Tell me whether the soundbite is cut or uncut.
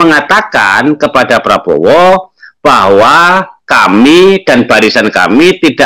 uncut